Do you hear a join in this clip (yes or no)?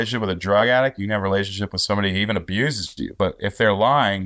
no